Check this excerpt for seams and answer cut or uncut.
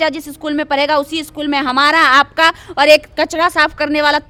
uncut